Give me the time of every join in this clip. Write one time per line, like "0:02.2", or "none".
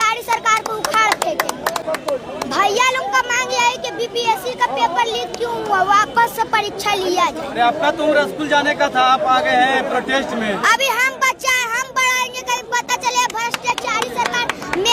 none